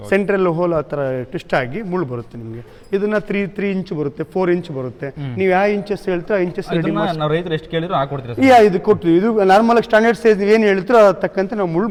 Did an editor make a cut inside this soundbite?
no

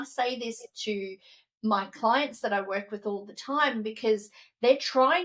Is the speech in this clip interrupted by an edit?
no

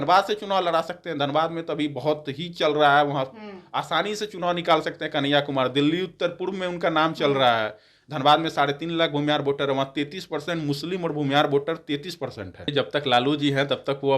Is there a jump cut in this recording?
yes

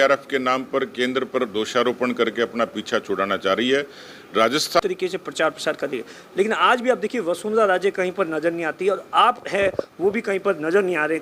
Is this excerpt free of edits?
no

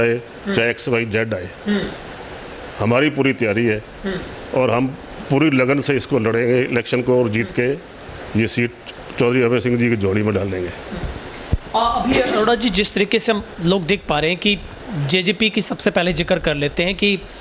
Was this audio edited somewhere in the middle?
no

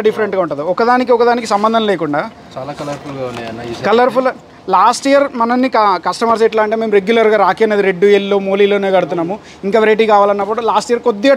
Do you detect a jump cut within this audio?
no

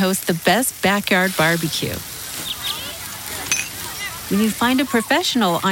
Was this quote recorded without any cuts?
yes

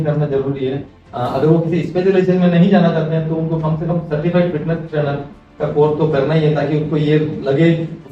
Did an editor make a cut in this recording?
no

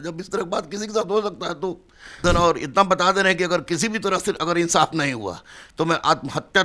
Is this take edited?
yes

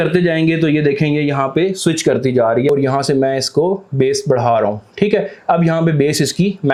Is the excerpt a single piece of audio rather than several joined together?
yes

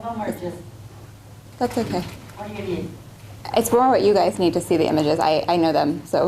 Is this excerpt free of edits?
no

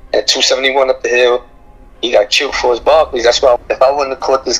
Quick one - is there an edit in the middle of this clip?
yes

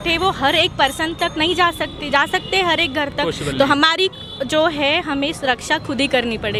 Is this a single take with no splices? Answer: yes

